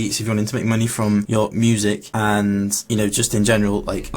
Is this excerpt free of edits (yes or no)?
no